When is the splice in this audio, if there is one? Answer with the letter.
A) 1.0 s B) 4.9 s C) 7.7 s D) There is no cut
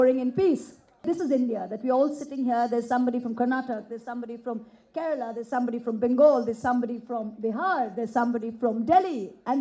A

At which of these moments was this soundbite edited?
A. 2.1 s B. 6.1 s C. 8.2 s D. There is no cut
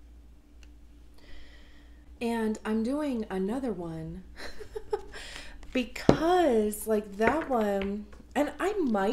A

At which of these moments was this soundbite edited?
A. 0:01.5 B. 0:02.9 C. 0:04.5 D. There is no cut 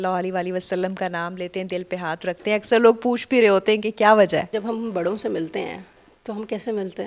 C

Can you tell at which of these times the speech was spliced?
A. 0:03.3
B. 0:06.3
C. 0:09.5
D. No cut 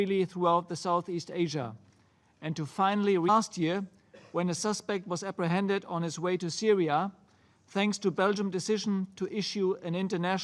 D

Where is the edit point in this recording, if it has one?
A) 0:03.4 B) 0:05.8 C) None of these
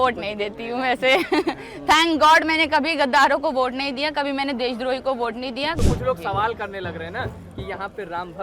B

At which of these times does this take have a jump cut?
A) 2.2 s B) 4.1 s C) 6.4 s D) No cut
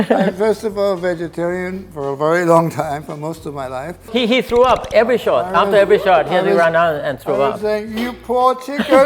B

